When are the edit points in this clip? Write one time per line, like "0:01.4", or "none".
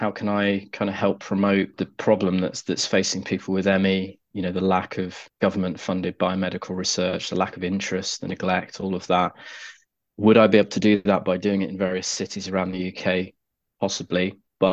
0:01.8
0:05.2

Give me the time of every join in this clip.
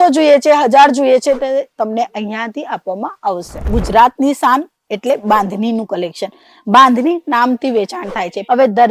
0:03.6

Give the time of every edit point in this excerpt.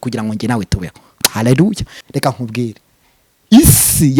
0:01.9

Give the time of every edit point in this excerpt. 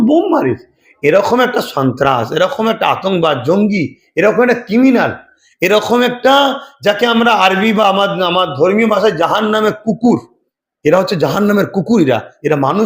none

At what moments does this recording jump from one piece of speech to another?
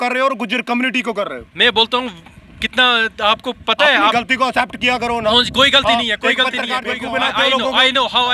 0:07.0

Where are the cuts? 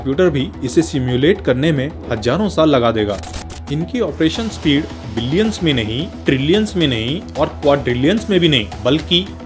0:03.5

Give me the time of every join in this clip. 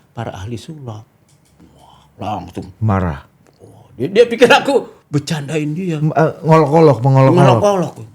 none

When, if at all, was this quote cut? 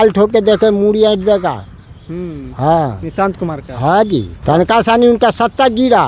0:04.3

